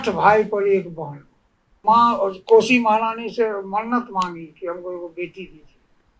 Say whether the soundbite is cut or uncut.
cut